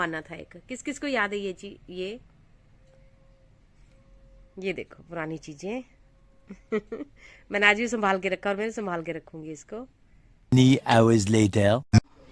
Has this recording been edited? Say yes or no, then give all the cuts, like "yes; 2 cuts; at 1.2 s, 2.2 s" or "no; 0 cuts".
no; 0 cuts